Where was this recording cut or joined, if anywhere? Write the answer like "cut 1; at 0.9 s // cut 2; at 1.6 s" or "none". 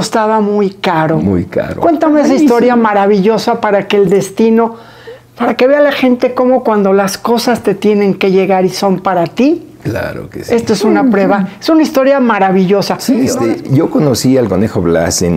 cut 1; at 13.3 s

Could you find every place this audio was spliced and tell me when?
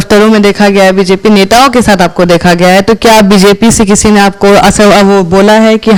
none

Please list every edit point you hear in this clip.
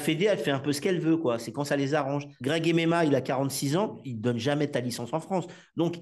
cut 1; at 2.3 s // cut 2; at 4.1 s

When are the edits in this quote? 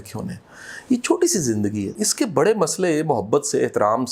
cut 1; at 2.0 s

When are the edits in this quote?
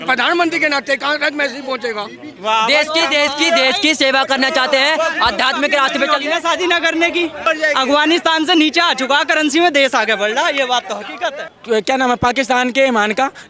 cut 1; at 2.4 s // cut 2; at 7.4 s // cut 3; at 11.5 s

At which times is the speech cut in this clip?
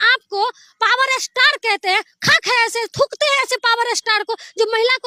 none

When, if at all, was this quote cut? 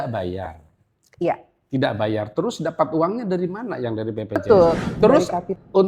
cut 1; at 4.4 s

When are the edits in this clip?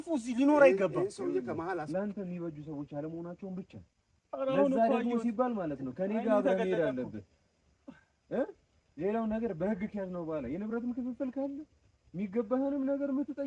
cut 1; at 1.9 s

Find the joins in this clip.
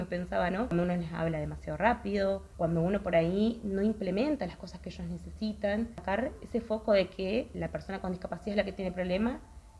cut 1; at 0.7 s // cut 2; at 2.5 s // cut 3; at 6.0 s // cut 4; at 7.5 s

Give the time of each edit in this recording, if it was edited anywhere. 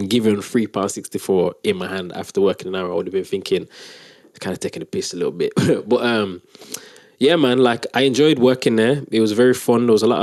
none

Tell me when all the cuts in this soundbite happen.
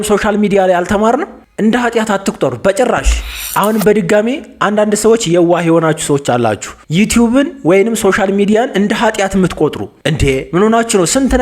cut 1; at 1.4 s // cut 2; at 3.4 s

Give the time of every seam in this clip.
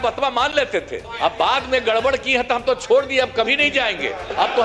cut 1; at 1.0 s

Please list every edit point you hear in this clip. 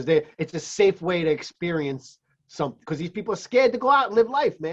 none

